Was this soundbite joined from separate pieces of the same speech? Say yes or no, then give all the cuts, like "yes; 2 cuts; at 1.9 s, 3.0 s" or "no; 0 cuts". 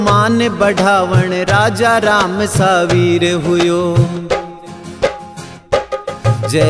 no; 0 cuts